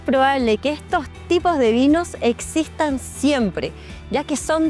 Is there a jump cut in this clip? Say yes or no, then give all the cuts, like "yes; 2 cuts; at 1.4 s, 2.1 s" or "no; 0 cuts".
no; 0 cuts